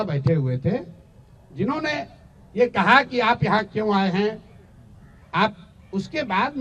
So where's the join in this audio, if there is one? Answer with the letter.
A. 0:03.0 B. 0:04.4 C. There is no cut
C